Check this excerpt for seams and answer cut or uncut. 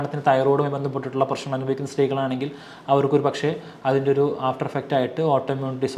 uncut